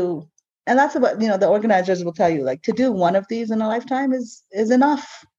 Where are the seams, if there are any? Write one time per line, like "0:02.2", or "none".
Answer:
none